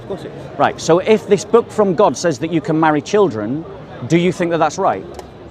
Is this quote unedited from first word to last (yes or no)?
yes